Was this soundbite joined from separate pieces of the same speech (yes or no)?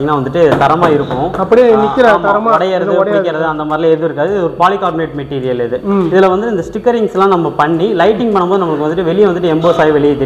no